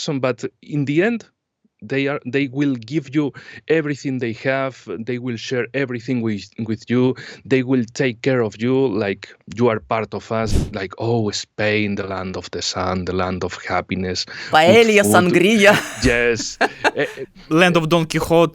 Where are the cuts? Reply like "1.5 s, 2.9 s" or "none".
10.5 s